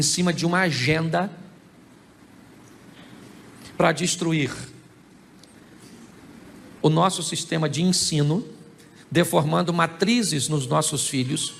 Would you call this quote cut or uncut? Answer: uncut